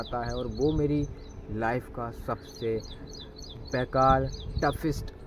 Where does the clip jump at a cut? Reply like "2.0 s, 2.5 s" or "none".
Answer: none